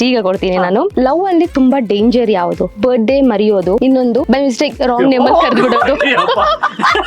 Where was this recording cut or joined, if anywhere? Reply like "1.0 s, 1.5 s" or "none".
0.9 s, 2.7 s, 4.0 s